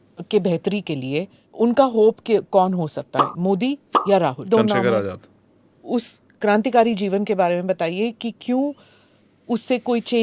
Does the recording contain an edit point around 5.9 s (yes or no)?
yes